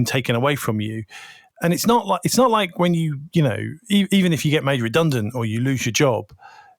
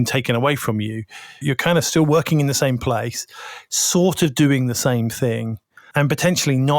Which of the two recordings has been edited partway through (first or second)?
second